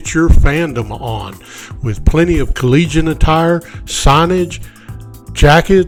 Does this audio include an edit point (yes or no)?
no